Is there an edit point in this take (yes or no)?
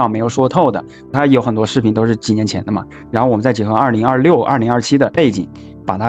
yes